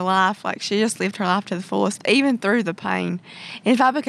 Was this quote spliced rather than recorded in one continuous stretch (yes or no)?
no